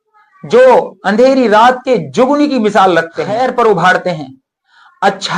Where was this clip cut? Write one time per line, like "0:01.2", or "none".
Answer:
0:03.3